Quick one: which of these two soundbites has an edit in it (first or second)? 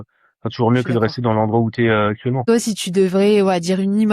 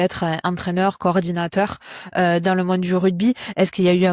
first